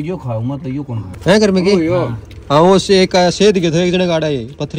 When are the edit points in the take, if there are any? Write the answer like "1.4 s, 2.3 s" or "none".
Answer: 1.0 s